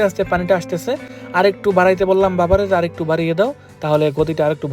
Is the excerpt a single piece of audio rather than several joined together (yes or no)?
yes